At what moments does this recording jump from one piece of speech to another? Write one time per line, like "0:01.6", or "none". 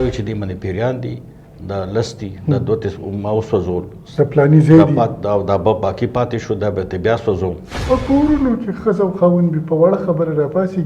0:07.7